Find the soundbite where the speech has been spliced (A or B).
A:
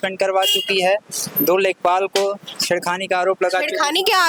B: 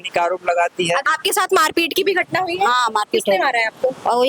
B